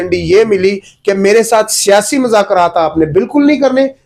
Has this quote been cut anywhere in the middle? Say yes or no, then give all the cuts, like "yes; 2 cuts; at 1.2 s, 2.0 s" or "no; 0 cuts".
no; 0 cuts